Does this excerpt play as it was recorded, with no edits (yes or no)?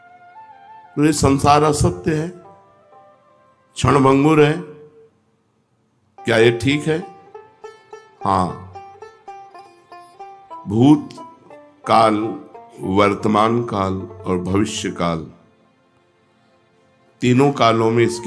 yes